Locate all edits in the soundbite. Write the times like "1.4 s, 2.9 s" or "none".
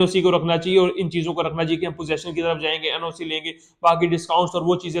none